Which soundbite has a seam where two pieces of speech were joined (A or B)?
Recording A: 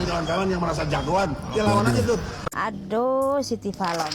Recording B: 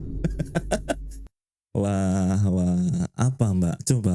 A